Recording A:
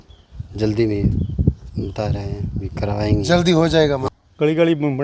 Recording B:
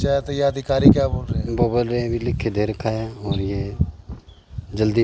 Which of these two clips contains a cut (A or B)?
A